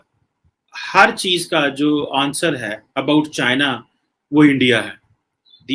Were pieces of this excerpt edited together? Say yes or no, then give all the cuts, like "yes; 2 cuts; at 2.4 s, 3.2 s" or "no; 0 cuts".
no; 0 cuts